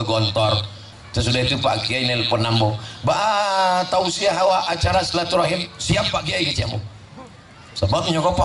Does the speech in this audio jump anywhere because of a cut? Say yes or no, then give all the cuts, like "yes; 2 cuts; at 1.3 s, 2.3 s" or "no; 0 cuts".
yes; 1 cut; at 0.9 s